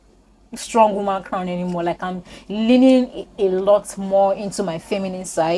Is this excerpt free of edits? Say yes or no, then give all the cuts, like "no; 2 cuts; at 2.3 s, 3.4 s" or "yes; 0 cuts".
yes; 0 cuts